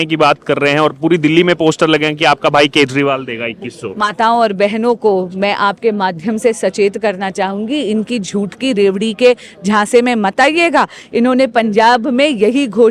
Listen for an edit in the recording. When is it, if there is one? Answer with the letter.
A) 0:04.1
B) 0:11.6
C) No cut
C